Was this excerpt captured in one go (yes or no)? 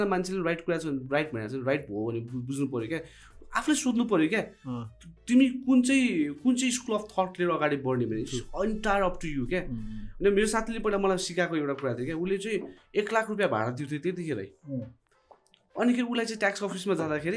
yes